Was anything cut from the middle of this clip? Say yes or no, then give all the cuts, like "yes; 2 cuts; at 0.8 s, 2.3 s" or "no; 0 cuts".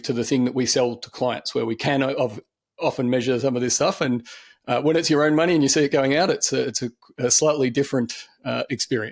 no; 0 cuts